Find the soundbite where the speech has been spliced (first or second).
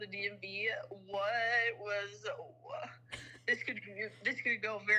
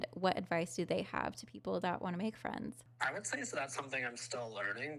second